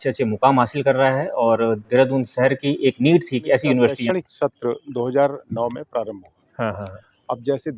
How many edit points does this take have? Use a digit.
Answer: 1